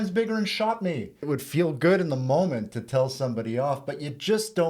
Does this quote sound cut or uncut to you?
cut